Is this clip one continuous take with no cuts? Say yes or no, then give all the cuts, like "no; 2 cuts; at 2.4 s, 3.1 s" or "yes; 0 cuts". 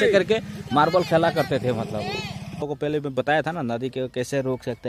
no; 1 cut; at 2.6 s